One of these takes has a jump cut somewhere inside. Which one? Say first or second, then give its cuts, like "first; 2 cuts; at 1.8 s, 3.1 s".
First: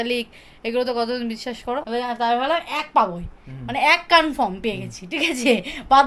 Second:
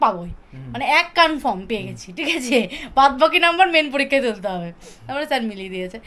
first; 1 cut; at 1.8 s